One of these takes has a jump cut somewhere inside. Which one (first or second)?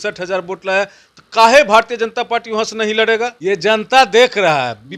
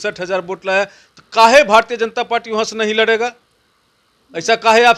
first